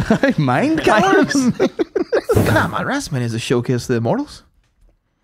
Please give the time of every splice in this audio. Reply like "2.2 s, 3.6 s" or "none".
2.4 s